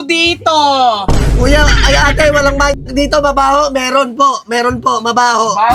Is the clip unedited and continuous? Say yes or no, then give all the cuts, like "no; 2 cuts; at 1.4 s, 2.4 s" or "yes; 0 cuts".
yes; 0 cuts